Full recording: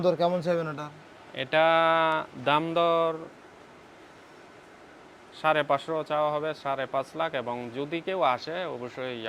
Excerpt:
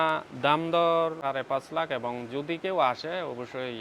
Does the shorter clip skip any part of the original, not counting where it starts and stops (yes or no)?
yes